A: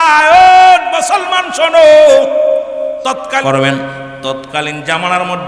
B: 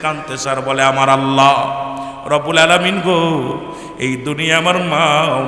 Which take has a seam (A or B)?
A